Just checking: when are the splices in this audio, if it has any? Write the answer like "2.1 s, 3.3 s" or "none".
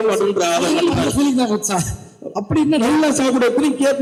none